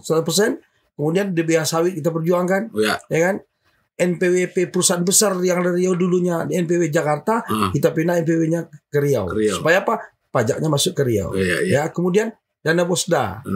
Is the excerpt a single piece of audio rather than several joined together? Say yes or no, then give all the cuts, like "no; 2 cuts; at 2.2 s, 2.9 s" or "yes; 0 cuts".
yes; 0 cuts